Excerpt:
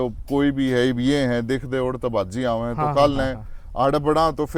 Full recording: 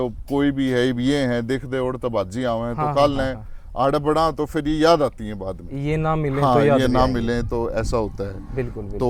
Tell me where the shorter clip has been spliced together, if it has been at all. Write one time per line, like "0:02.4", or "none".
none